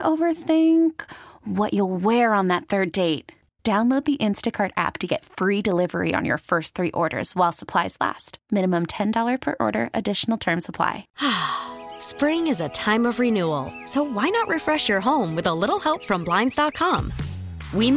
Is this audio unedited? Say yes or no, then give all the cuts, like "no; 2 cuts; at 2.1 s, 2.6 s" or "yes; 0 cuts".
no; 1 cut; at 11.1 s